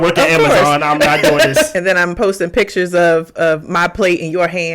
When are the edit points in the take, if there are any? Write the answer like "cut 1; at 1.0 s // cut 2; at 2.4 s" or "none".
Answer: cut 1; at 1.7 s